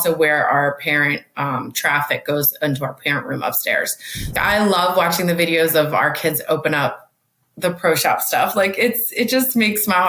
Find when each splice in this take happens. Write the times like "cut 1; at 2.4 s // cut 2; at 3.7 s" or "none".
cut 1; at 4.3 s